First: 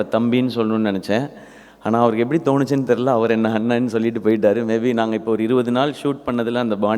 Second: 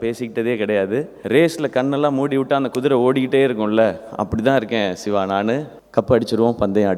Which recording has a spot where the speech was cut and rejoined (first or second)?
second